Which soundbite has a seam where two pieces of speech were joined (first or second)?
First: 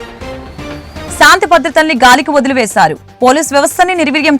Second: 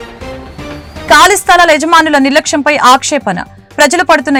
first